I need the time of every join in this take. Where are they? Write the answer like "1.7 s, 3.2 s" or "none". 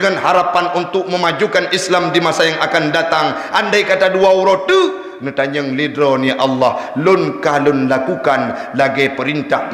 none